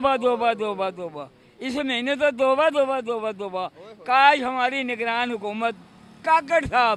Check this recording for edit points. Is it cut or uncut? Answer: uncut